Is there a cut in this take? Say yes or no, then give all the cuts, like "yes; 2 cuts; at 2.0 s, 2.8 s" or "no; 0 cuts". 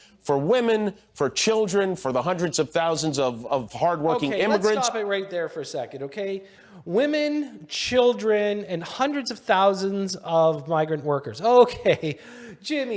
no; 0 cuts